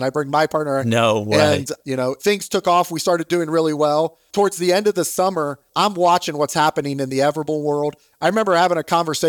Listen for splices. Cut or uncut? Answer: cut